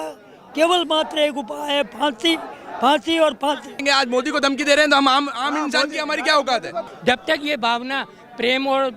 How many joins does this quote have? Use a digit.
2